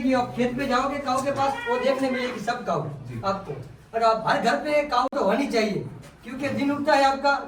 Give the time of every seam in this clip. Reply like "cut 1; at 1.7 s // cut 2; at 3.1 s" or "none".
none